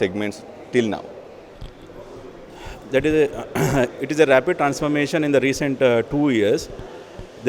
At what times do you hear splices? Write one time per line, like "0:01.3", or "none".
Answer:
none